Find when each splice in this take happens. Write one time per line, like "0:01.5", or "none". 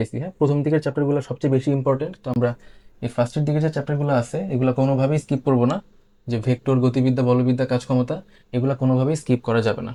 none